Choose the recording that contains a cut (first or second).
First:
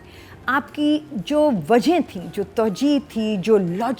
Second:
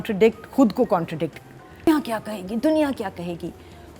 second